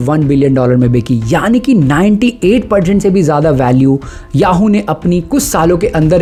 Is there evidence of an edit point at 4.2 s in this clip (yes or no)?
no